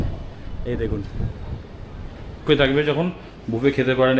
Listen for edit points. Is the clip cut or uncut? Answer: cut